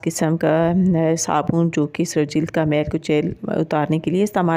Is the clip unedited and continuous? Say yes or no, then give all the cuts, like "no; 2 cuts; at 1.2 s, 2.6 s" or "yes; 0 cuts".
yes; 0 cuts